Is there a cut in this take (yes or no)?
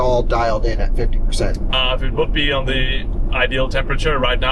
no